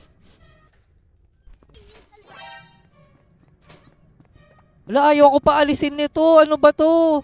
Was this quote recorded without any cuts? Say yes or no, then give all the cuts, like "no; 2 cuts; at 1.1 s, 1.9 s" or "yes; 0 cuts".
no; 1 cut; at 1.7 s